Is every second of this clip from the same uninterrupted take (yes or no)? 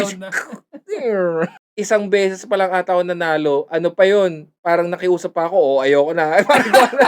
no